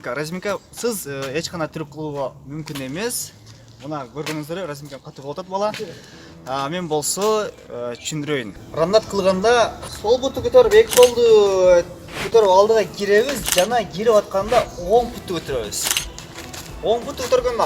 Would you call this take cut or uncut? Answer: uncut